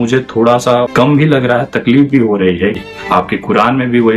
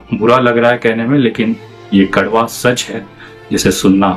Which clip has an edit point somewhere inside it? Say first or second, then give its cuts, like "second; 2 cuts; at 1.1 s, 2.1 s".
first; 2 cuts; at 0.9 s, 2.8 s